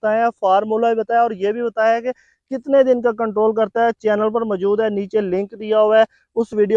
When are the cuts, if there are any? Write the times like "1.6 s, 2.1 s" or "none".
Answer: none